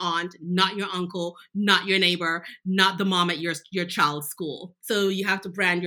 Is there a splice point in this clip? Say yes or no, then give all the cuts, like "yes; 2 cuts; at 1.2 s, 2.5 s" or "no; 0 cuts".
yes; 1 cut; at 4.7 s